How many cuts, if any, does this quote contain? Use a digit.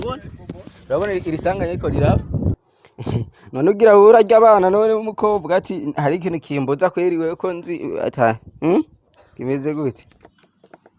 1